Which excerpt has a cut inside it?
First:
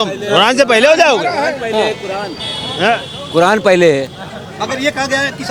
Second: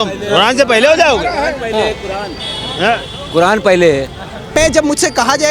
second; 1 cut; at 4.6 s

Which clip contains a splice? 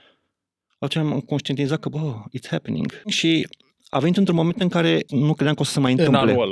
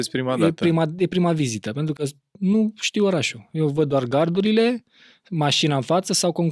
first; 2 cuts; at 3.2 s, 5.1 s

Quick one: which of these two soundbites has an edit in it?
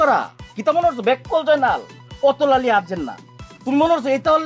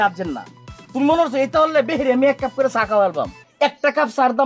second; 1 cut; at 3.4 s

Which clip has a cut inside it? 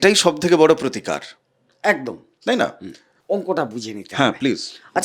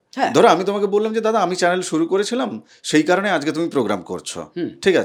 first; 1 cut; at 3.1 s

